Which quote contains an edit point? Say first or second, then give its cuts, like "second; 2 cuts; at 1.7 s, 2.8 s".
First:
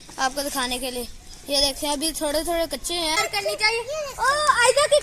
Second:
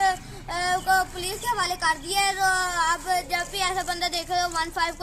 first; 1 cut; at 3.2 s